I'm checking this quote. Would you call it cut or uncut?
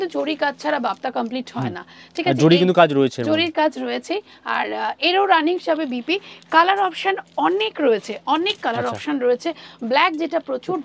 uncut